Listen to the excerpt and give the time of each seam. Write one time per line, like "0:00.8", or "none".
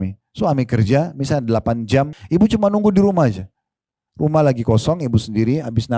0:02.2